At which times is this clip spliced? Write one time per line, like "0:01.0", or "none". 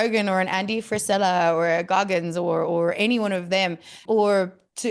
0:03.9